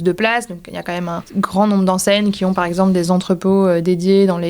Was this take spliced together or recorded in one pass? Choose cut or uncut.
cut